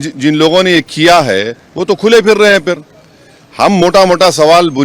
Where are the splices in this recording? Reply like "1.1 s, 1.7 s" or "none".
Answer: none